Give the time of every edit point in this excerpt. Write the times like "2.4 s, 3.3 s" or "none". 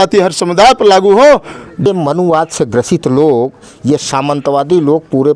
1.9 s